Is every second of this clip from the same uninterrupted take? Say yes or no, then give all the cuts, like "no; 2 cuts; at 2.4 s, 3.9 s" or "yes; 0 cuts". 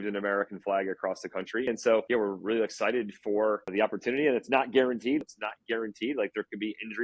no; 3 cuts; at 1.7 s, 3.7 s, 5.2 s